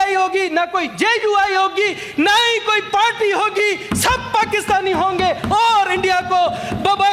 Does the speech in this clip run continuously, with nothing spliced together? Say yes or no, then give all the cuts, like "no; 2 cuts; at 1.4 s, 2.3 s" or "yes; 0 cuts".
yes; 0 cuts